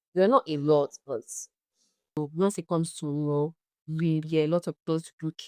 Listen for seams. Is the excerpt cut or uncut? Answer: cut